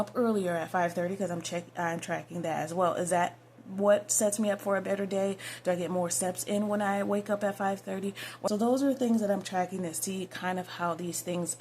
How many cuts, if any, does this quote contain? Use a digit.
1